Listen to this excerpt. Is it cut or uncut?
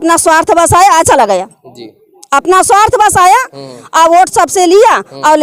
uncut